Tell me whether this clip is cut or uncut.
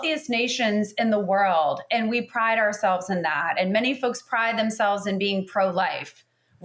uncut